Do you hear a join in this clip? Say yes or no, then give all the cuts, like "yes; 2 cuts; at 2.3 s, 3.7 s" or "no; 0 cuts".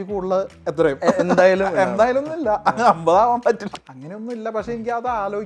yes; 1 cut; at 3.6 s